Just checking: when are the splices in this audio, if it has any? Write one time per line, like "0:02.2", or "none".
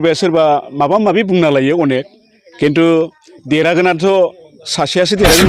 none